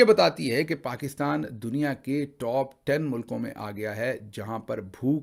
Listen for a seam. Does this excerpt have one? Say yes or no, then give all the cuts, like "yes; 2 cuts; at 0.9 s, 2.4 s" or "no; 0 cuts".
no; 0 cuts